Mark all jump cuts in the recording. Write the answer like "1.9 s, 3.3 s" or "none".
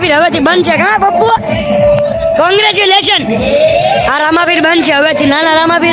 none